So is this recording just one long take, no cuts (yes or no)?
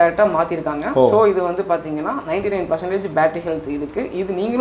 yes